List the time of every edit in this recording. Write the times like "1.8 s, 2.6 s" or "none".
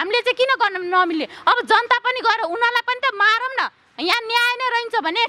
none